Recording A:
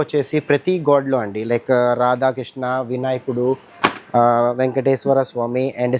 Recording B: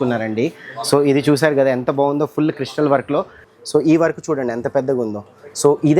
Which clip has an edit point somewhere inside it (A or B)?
B